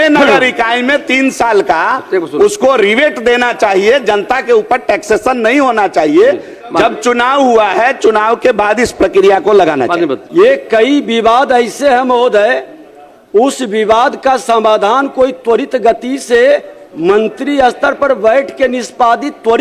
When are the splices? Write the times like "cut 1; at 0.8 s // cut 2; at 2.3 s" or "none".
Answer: cut 1; at 10.2 s